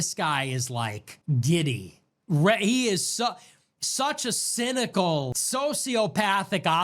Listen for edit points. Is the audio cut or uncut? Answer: cut